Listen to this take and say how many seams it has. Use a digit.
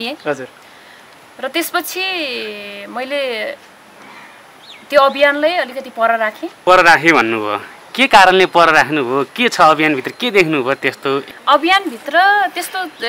2